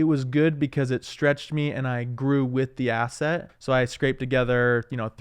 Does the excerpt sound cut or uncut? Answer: cut